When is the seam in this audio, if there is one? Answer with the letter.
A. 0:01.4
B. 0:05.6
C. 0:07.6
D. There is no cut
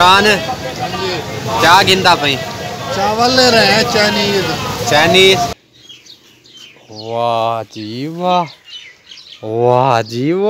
B